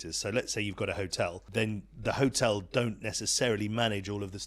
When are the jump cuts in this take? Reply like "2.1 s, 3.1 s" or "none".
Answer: 1.4 s